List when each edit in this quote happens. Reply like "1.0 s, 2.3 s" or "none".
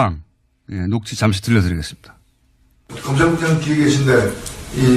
3.1 s